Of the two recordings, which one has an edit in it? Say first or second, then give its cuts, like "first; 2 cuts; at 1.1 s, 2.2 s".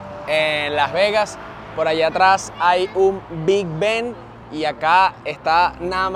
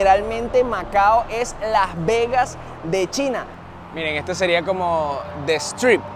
second; 1 cut; at 3.5 s